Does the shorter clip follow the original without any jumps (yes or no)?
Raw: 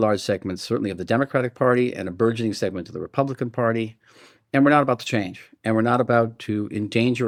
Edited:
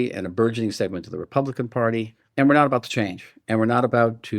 no